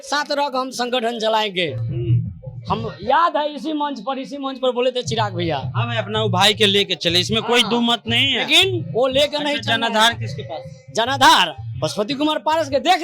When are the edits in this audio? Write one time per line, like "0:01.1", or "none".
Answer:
none